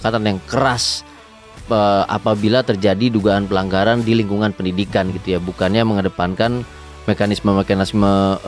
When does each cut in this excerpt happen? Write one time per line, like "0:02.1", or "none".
none